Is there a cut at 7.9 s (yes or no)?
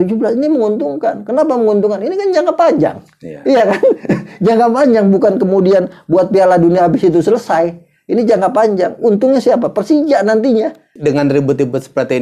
no